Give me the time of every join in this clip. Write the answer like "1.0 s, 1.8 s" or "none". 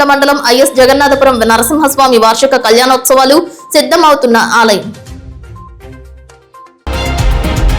6.8 s